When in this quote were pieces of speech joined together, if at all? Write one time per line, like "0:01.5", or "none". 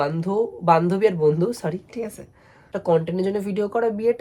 0:02.7